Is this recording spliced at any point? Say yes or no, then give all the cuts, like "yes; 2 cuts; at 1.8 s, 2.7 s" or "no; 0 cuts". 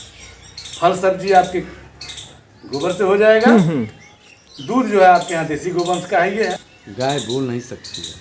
yes; 1 cut; at 6.7 s